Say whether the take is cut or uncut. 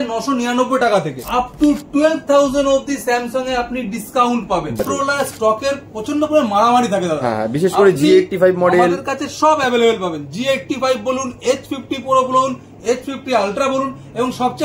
cut